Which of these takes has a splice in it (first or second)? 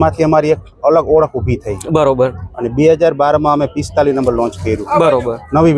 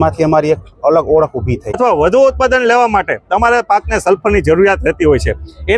second